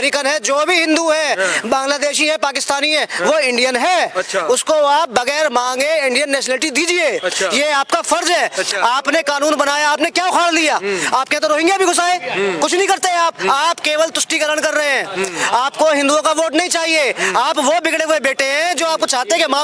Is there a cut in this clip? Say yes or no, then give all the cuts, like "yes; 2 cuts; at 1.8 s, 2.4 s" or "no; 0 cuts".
no; 0 cuts